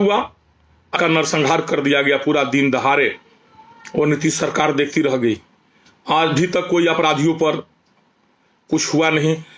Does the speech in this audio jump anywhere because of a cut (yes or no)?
yes